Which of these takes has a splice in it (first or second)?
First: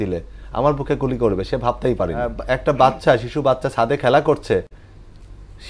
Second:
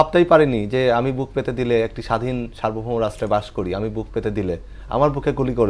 first